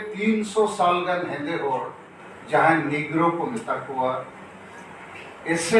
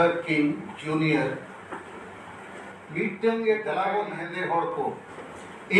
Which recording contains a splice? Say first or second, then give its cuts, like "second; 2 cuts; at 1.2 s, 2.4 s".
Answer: second; 1 cut; at 3.7 s